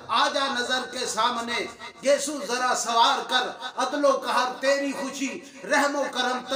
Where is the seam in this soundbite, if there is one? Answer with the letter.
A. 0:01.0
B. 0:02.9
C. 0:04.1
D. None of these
D